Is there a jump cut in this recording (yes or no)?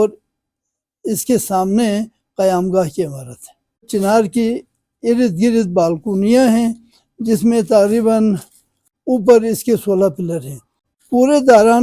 yes